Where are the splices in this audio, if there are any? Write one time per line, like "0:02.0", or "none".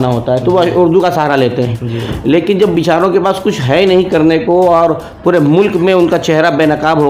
none